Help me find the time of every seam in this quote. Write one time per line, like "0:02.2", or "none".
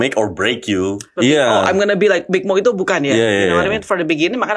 0:01.1
0:02.2

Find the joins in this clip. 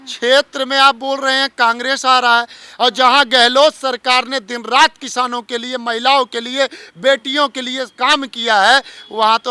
none

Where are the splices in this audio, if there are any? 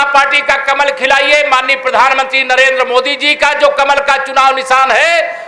none

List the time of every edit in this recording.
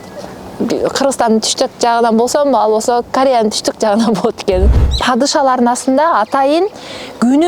0:04.8

